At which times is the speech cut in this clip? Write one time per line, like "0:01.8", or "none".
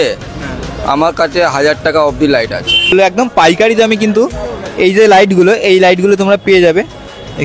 0:02.9